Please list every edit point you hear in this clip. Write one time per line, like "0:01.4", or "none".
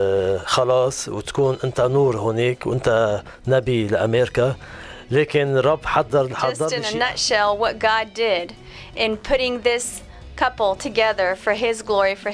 0:06.8